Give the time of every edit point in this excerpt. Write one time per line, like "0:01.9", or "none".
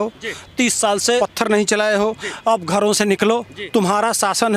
0:01.2

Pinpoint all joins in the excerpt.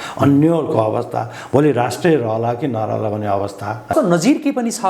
0:03.9

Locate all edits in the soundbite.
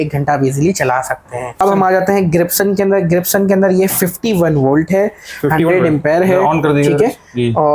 0:01.4

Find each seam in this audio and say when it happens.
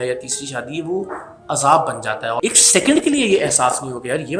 0:02.4

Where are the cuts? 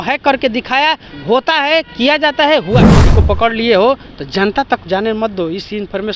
0:03.0

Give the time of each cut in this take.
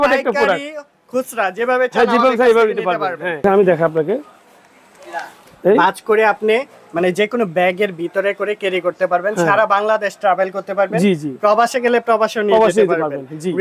0:03.4

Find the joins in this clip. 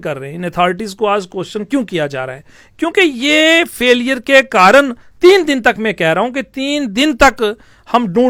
none

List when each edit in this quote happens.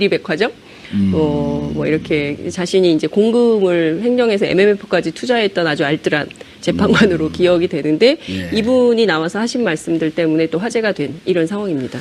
0:07.4

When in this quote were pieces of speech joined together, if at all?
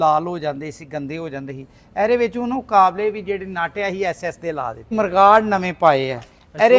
0:04.8

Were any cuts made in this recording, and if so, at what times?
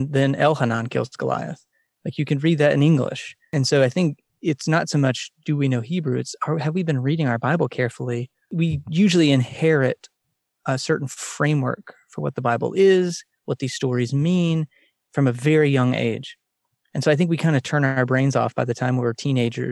0:03.4
0:08.5

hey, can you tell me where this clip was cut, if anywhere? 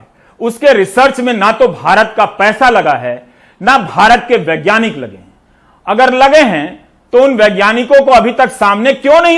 none

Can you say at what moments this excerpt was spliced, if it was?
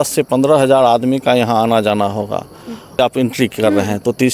0:03.0

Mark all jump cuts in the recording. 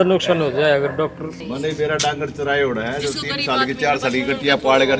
0:01.4

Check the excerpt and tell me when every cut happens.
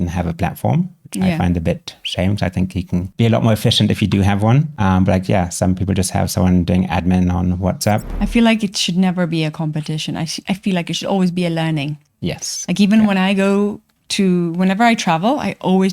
0:03.1
0:04.7
0:08.1

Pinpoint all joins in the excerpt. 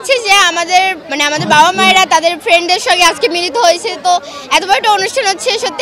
0:01.1

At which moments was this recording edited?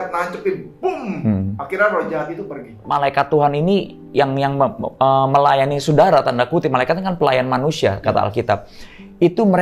0:02.8

